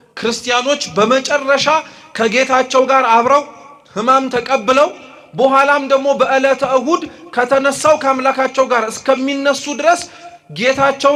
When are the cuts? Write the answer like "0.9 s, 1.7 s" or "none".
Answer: none